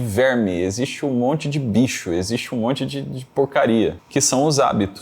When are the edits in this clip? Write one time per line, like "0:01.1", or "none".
0:04.0